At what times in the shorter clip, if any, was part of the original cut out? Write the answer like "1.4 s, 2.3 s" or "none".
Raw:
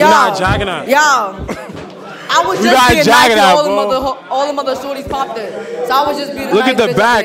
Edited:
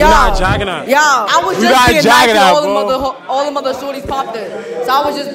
1.3 s